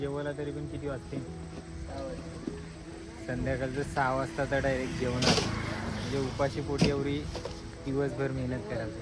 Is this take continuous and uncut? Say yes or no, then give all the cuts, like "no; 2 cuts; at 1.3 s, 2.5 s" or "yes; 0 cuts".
yes; 0 cuts